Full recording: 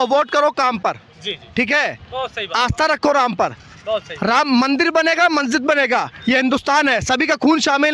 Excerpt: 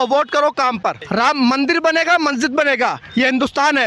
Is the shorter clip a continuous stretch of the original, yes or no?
no